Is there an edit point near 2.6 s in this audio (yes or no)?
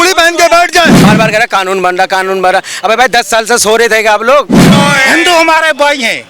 no